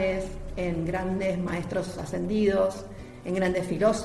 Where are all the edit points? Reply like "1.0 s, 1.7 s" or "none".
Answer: none